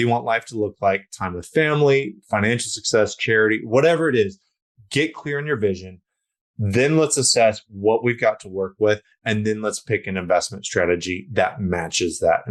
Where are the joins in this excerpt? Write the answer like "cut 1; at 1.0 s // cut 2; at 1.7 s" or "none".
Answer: none